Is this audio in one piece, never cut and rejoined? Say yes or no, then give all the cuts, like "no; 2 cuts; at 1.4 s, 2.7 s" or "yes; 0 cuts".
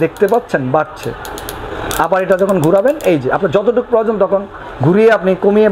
yes; 0 cuts